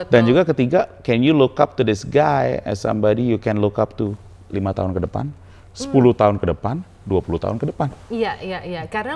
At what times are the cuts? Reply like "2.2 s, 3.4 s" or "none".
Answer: none